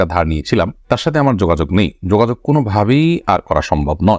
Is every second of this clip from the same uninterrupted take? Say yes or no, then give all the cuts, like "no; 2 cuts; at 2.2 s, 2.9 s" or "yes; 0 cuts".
yes; 0 cuts